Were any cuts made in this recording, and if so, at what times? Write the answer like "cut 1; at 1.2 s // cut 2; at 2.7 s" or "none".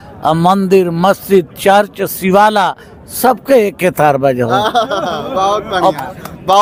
none